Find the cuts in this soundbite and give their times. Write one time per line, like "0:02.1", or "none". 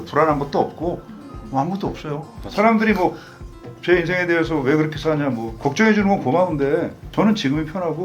0:07.0